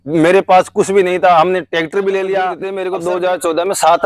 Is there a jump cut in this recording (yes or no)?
yes